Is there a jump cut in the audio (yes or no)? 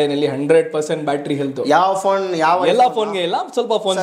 no